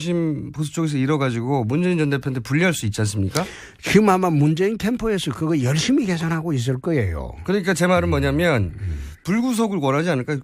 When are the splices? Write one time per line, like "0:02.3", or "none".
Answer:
0:04.6